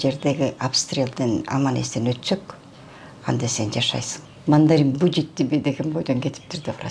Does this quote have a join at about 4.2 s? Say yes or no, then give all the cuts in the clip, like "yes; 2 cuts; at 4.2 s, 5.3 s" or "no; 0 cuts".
yes; 1 cut; at 4.2 s